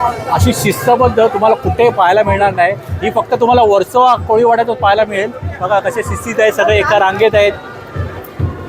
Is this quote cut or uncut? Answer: uncut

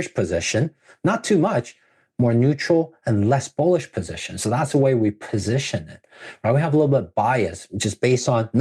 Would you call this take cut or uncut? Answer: uncut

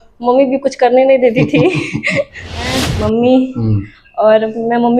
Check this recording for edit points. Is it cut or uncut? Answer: cut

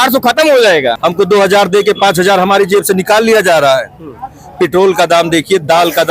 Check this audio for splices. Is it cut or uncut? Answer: cut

